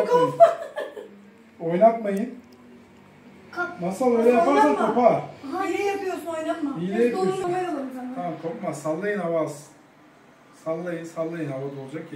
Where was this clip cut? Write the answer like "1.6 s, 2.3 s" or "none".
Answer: 7.4 s